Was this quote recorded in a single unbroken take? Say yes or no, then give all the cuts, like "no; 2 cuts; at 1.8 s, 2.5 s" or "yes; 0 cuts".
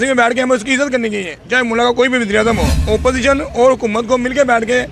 no; 1 cut; at 2.7 s